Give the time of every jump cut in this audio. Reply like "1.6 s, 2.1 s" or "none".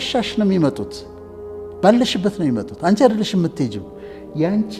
none